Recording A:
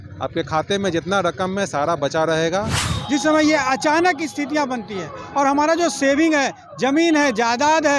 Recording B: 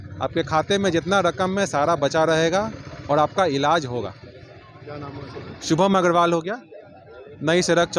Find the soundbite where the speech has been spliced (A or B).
A